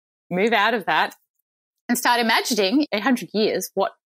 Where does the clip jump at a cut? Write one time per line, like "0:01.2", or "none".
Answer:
0:02.9

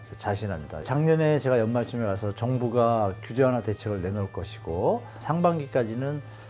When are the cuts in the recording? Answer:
0:00.8
0:05.1

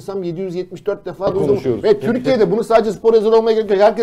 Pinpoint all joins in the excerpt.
0:01.3

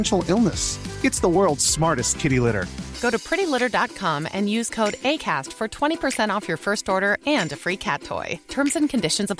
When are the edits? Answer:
none

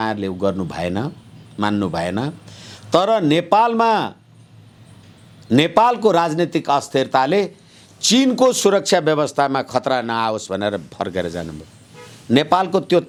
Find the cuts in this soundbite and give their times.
none

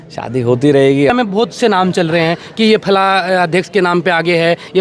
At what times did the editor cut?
0:01.1

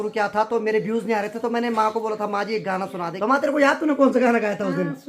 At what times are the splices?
0:03.1

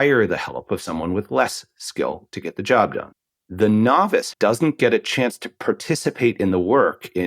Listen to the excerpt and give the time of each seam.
0:03.1
0:04.3

